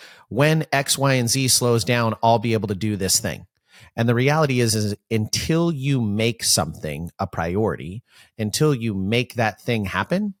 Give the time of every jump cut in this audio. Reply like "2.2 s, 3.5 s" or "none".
none